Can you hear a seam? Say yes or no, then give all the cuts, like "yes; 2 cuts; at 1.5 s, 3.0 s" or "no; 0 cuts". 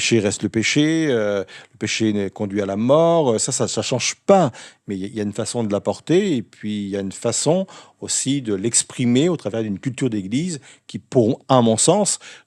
no; 0 cuts